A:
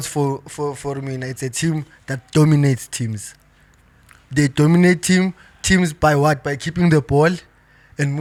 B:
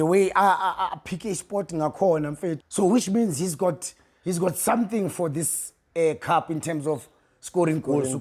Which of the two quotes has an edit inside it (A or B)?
B